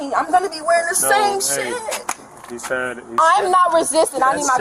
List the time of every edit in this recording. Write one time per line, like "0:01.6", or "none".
0:03.2